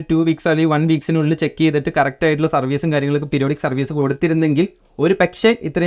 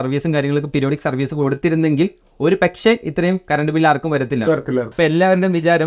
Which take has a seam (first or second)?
second